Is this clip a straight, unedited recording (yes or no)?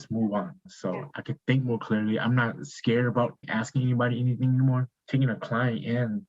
no